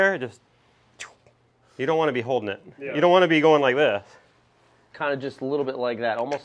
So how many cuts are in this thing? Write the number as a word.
two